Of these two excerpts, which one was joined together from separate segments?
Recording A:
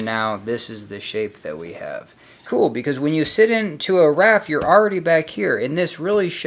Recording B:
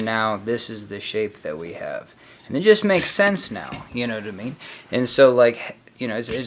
A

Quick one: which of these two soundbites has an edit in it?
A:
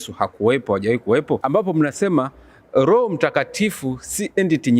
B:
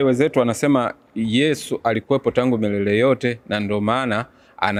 A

